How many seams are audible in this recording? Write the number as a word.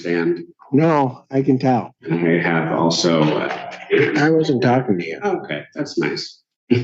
one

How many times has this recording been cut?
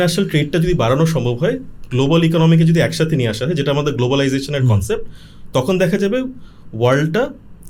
zero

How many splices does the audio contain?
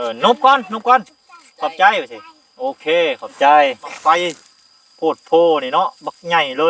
one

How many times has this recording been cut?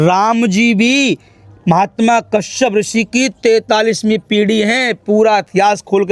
zero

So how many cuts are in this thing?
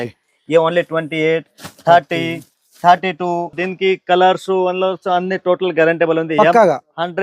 one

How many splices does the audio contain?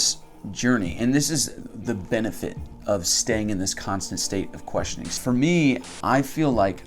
two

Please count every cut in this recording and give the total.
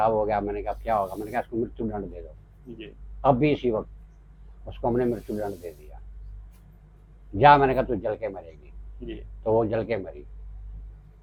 zero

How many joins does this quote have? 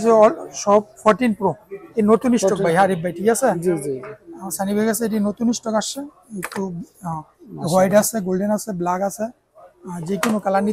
zero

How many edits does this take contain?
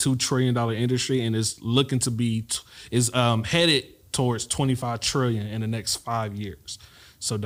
zero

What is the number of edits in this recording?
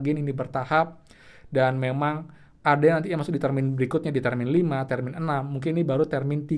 zero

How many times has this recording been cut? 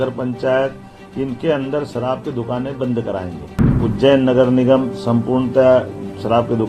one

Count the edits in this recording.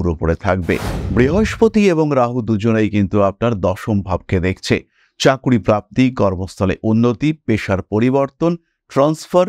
one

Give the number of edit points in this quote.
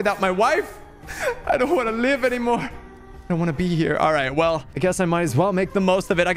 zero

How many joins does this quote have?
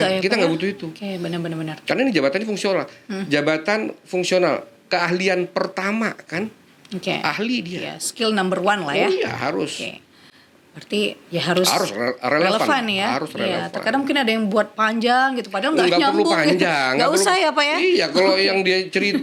zero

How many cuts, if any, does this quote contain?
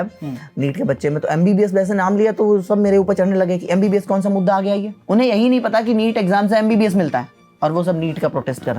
one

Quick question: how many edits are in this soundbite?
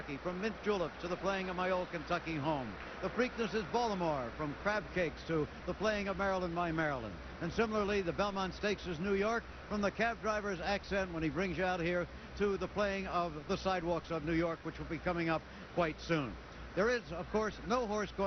zero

